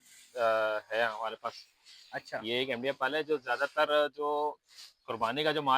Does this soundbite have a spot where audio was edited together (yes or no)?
no